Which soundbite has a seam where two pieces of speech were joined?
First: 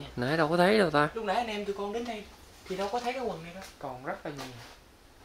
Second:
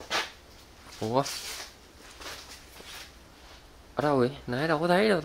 first; 1 cut; at 3.7 s

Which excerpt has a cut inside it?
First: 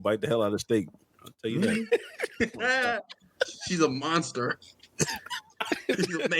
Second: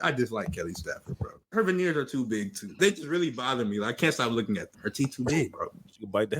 second; 3 cuts; at 1.5 s, 2.7 s, 4.8 s

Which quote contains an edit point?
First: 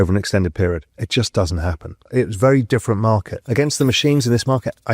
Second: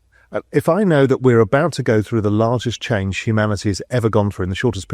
first; 3 cuts; at 0.9 s, 2.0 s, 3.4 s

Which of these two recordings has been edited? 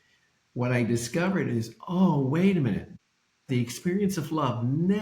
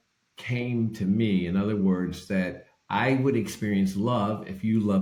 first; 1 cut; at 3.4 s

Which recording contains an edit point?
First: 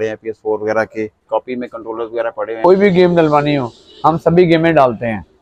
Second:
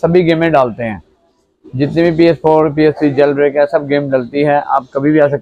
first; 2 cuts; at 1.3 s, 2.6 s

